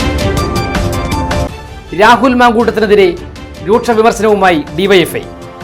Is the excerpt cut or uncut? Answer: uncut